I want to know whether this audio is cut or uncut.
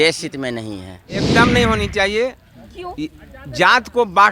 cut